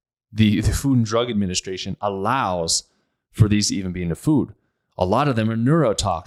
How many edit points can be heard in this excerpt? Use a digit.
0